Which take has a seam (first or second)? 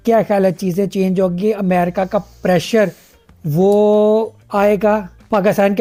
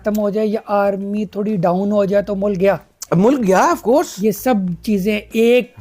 second